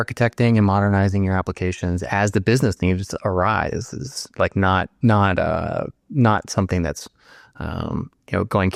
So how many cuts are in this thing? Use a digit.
0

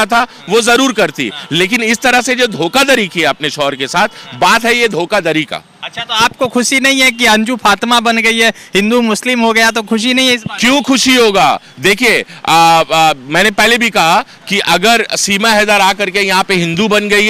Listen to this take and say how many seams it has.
0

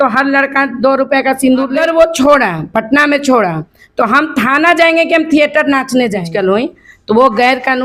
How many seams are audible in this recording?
2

